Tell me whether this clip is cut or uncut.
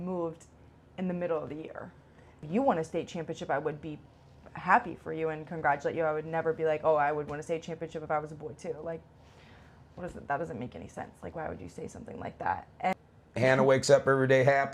cut